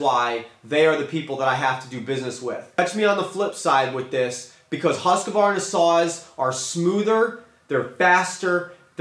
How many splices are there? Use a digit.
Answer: 1